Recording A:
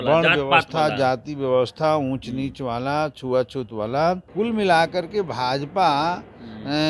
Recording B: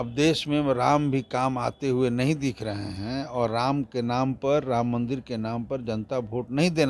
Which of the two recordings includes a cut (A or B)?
A